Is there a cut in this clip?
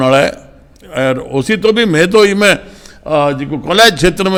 no; 0 cuts

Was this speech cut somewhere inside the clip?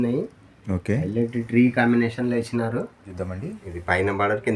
yes; 1 cut; at 3.1 s

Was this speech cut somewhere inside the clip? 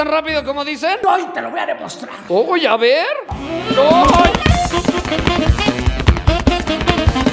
no; 0 cuts

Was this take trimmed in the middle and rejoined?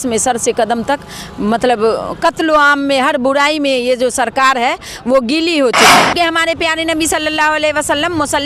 yes; 1 cut; at 5.9 s

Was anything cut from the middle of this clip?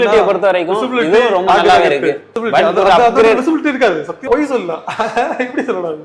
yes; 2 cuts; at 2.3 s, 4.3 s

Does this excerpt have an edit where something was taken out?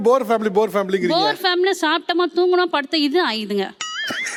no; 0 cuts

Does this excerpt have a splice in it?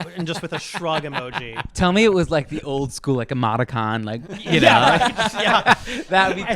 yes; 2 cuts; at 1.6 s, 4.4 s

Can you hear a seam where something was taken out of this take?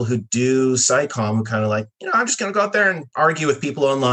yes; 1 cut; at 3.0 s

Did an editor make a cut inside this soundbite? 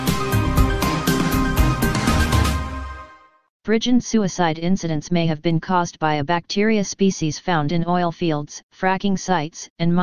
yes; 1 cut; at 1.0 s

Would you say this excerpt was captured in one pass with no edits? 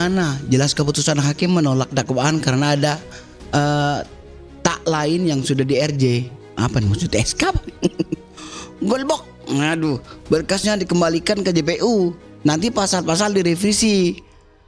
yes; 0 cuts

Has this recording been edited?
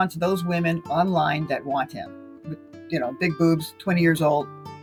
no; 0 cuts

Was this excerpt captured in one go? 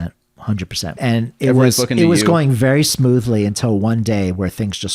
no; 1 cut; at 0.9 s

